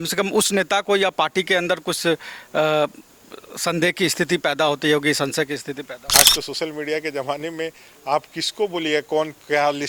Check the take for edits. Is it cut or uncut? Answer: cut